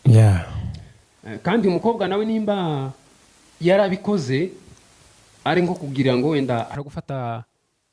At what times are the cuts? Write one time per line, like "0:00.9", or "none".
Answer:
0:06.8